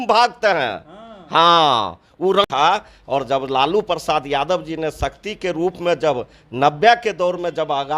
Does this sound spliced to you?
yes; 1 cut; at 2.4 s

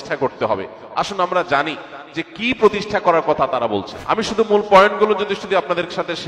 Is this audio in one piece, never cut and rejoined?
no; 1 cut; at 3.9 s

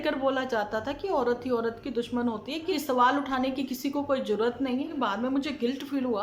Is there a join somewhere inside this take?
yes; 2 cuts; at 2.7 s, 4.9 s

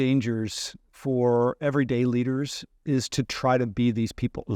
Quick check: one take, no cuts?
yes; 0 cuts

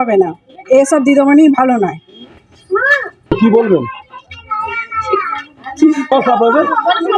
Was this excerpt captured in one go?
yes; 0 cuts

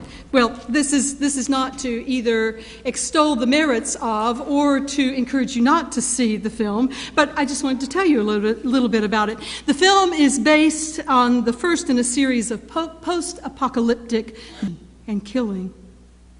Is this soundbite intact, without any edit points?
yes; 0 cuts

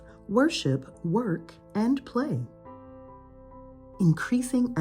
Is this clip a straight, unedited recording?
no; 2 cuts; at 2.5 s, 3.9 s

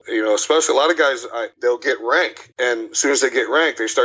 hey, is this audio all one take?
no; 2 cuts; at 1.5 s, 2.4 s

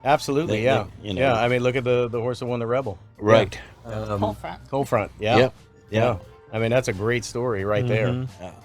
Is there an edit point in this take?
yes; 1 cut; at 3.0 s

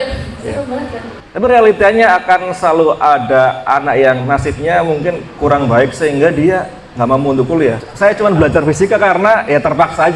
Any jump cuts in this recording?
yes; 2 cuts; at 1.0 s, 7.8 s

